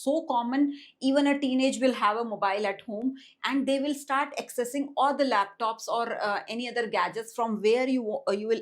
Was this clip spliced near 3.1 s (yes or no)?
no